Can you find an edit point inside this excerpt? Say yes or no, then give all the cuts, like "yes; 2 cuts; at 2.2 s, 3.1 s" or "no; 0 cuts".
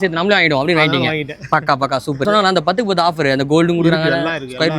yes; 1 cut; at 2.2 s